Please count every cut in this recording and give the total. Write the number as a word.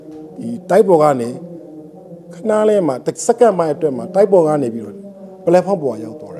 zero